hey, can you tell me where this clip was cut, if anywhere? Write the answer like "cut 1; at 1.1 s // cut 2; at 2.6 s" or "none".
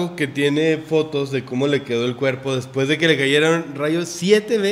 none